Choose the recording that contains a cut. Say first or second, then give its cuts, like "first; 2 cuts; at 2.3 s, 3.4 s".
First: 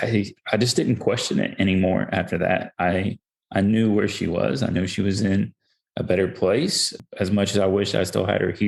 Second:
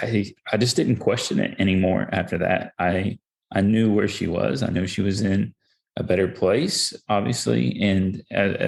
first; 1 cut; at 7.0 s